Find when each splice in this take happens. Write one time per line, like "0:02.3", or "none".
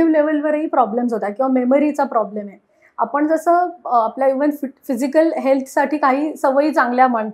0:02.8